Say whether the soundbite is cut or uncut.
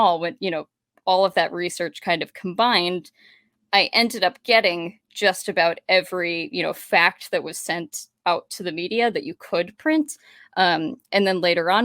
uncut